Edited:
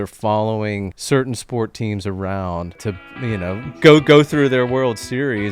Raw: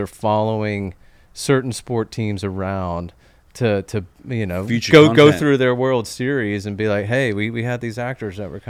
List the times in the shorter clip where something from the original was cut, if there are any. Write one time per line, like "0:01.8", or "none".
0:00.9
0:02.8

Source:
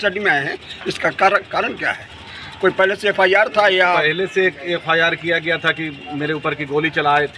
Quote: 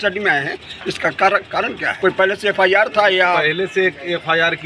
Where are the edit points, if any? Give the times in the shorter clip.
0:01.9

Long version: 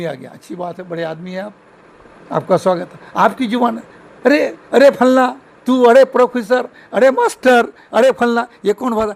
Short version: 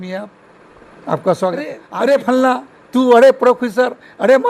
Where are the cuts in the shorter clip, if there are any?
0:01.8

